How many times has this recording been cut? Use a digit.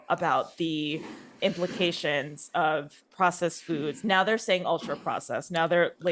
1